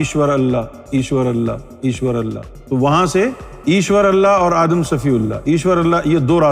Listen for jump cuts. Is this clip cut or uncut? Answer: cut